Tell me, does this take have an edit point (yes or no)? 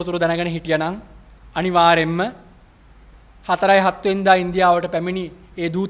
no